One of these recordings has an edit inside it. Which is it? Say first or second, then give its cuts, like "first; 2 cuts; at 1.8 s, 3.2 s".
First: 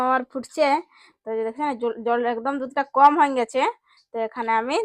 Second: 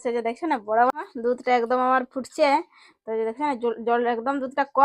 second; 1 cut; at 0.9 s